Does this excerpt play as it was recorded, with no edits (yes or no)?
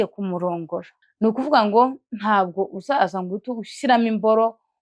no